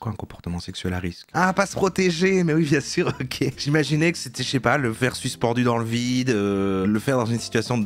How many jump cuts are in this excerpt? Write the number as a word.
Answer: one